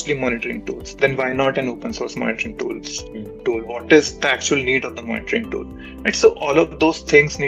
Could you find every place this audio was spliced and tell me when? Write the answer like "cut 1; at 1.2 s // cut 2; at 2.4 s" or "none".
none